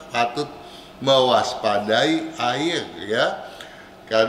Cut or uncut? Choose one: uncut